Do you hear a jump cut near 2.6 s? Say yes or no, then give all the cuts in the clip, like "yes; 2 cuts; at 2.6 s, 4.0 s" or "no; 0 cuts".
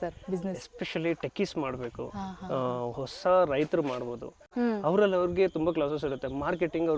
no; 1 cut; at 4.4 s